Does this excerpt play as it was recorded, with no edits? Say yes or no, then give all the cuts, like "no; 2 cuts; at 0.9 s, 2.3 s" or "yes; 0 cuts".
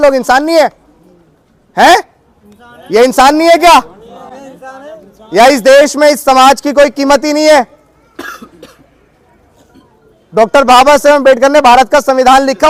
yes; 0 cuts